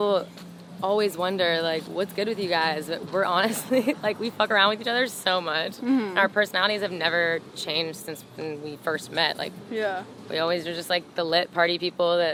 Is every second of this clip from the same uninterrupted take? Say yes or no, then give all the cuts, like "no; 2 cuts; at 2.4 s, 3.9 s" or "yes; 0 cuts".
yes; 0 cuts